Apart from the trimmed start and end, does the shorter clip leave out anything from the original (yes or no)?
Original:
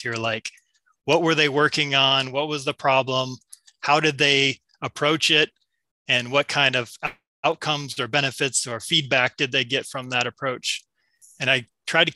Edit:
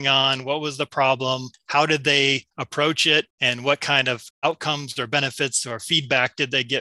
yes